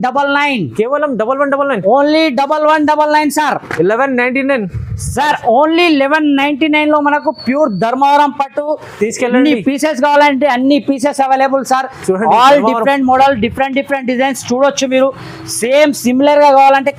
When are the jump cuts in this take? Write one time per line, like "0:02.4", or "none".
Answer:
none